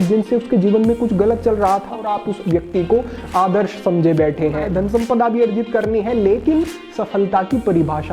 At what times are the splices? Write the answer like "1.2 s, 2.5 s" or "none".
2.0 s, 4.7 s